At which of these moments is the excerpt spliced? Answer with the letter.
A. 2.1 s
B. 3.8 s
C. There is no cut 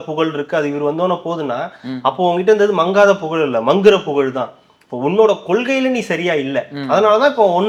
C